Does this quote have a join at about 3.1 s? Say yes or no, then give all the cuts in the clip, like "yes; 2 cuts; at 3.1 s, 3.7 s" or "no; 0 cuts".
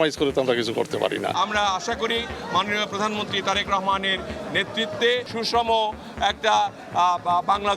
no; 2 cuts; at 1.3 s, 5.3 s